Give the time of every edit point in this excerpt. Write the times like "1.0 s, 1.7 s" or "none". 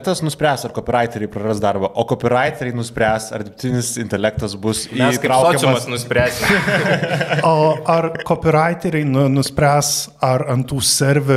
none